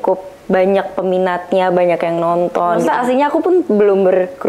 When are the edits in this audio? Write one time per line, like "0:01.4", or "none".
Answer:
0:02.8